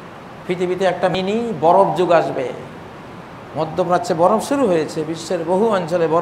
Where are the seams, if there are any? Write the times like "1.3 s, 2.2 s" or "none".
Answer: 1.1 s